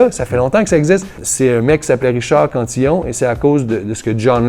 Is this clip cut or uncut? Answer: cut